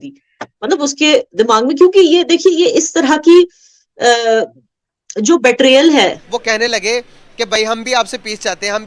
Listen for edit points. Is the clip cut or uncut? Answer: cut